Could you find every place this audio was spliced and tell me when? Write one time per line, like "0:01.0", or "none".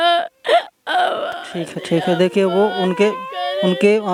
none